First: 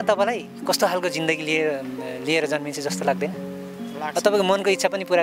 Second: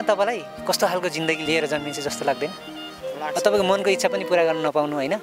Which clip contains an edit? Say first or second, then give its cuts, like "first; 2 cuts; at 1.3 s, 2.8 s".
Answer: second; 1 cut; at 1.4 s